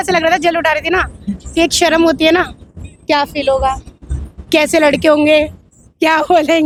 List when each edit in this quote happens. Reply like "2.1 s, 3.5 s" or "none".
none